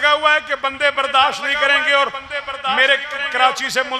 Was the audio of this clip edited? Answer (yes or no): no